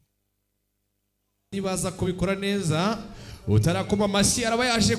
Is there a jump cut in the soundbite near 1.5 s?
yes; 1 cut; at 1.5 s

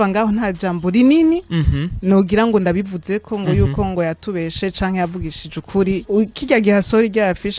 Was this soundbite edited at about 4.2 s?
no; 1 cut; at 6.0 s

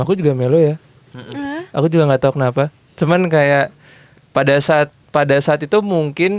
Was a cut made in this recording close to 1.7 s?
no; 0 cuts

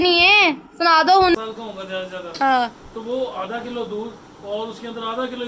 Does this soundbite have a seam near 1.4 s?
yes; 1 cut; at 1.4 s

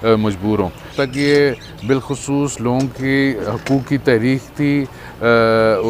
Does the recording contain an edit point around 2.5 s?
no; 1 cut; at 0.9 s

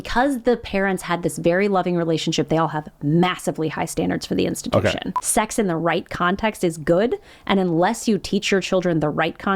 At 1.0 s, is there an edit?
no; 1 cut; at 5.1 s

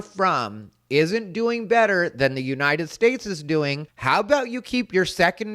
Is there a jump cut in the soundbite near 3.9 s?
yes; 1 cut; at 3.9 s

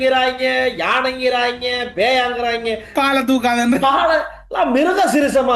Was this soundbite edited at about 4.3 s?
no; 1 cut; at 2.8 s

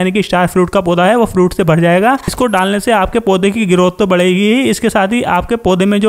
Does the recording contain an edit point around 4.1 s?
no; 1 cut; at 2.2 s

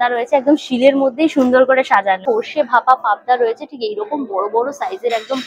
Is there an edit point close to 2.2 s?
yes; 1 cut; at 2.2 s

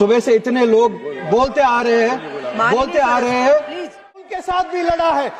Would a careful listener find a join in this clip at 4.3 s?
yes; 1 cut; at 4.3 s

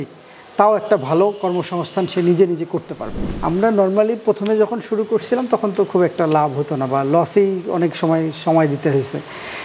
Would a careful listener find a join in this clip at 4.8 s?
no; 1 cut; at 3.1 s

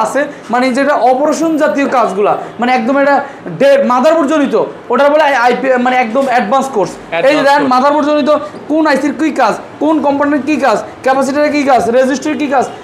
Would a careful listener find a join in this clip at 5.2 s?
no; 0 cuts

